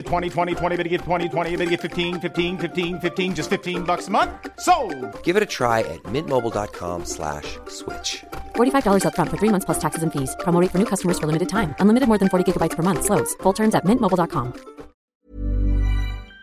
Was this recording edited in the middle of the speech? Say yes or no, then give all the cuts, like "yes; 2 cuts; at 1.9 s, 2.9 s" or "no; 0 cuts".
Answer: yes; 1 cut; at 15.1 s